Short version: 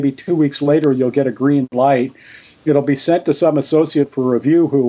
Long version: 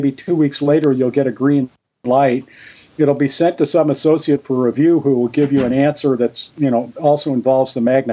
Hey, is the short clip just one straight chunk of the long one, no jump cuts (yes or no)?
no